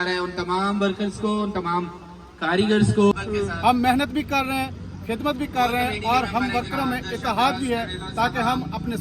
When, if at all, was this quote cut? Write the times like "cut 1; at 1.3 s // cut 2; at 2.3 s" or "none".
cut 1; at 3.1 s